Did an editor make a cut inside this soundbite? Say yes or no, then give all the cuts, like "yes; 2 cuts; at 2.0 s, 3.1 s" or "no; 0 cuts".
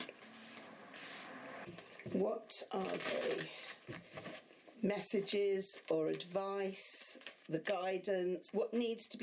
yes; 2 cuts; at 1.6 s, 8.4 s